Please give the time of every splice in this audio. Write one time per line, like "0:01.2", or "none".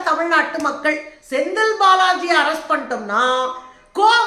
0:01.1